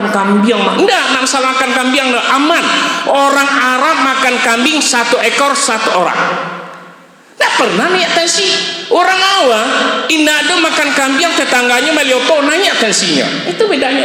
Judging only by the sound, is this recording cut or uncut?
uncut